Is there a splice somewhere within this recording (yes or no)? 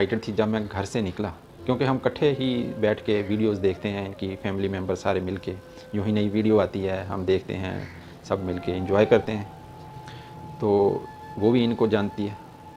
no